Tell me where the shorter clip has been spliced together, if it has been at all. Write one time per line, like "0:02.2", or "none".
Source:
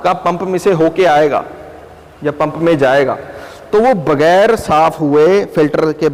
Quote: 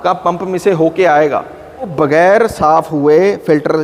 0:01.9